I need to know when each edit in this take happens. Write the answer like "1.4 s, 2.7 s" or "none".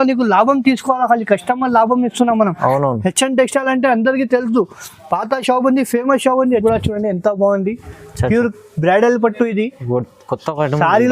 6.6 s

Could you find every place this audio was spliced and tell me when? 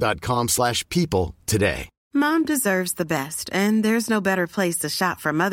1.9 s

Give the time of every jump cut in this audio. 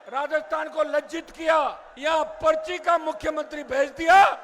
1.9 s

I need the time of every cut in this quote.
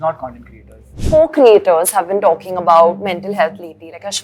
0.9 s

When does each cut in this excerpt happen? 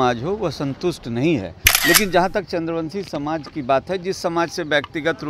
1.6 s

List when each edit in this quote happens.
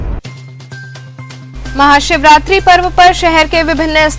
1.5 s

